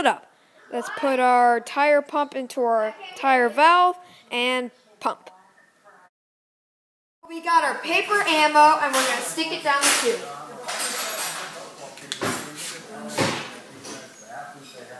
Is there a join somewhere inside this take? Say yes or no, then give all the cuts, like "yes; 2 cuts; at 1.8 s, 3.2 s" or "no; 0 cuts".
yes; 1 cut; at 10.5 s